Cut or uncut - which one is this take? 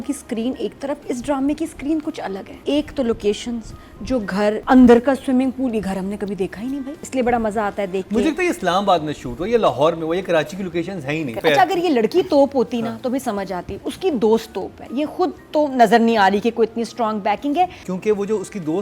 cut